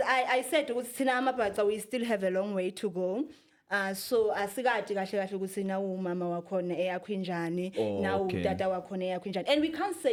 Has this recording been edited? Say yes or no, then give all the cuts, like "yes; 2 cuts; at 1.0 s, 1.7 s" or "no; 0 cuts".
no; 0 cuts